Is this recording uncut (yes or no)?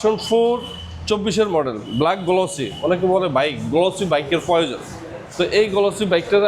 yes